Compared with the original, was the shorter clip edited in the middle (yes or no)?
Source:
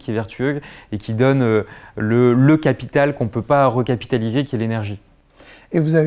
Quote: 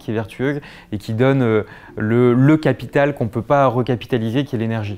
no